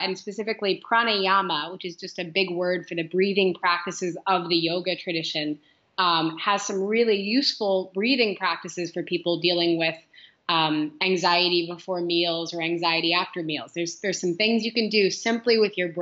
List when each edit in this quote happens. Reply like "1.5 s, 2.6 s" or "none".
none